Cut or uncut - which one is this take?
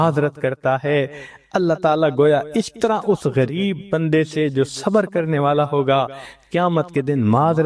uncut